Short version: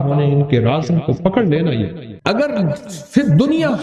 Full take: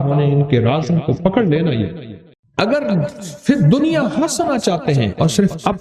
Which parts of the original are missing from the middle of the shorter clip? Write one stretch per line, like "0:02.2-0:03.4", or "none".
0:02.1-0:02.4

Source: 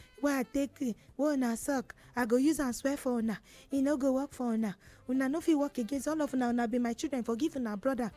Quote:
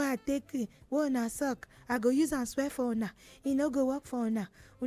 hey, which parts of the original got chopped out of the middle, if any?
none

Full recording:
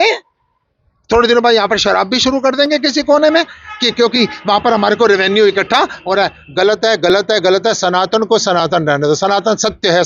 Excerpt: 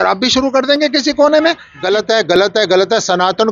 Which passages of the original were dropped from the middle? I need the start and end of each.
0:03.6-0:06.4

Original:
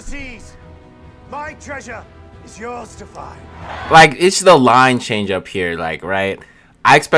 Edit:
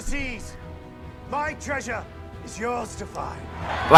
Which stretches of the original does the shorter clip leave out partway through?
none

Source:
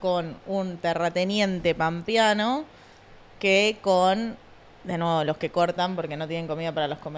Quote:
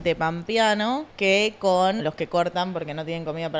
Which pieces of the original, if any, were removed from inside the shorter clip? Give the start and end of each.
0:02.7-0:03.3
0:04.2-0:05.2

